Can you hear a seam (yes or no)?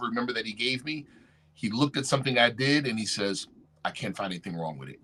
no